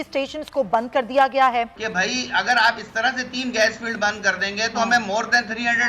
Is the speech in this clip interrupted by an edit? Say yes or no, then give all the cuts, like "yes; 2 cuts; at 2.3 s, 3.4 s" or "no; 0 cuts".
yes; 1 cut; at 1.8 s